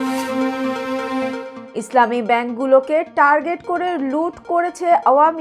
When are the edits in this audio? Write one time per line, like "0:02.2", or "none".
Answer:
0:01.5

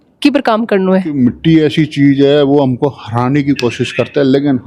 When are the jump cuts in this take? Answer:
0:01.1

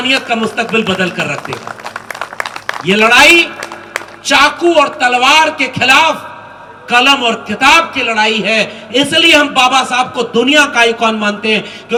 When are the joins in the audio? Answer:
none

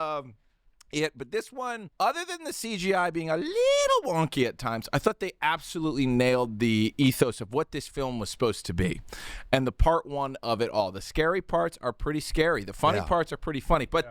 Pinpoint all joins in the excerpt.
0:01.9

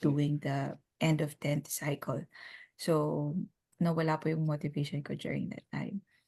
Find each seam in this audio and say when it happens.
0:03.7

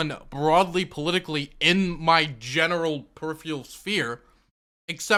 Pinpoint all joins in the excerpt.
none

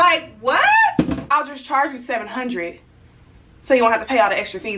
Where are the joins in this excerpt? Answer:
0:01.3

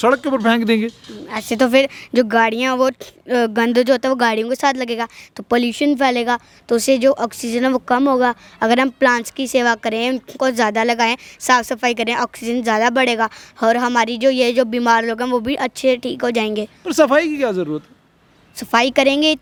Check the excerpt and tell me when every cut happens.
none

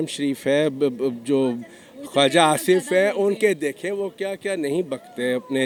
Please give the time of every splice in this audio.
none

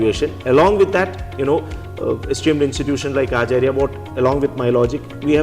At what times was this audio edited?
none

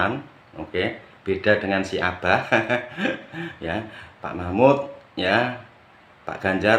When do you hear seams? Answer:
none

